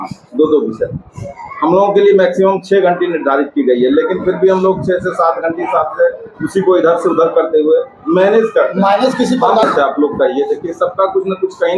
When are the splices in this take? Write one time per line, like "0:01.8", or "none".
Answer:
0:09.6